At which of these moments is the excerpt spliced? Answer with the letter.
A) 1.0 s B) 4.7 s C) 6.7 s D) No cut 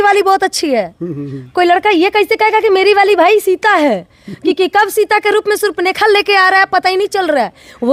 D